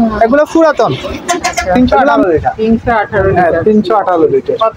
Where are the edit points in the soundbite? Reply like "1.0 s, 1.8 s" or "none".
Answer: 1.8 s